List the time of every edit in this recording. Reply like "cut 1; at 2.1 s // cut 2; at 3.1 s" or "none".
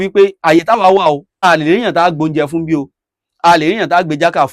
none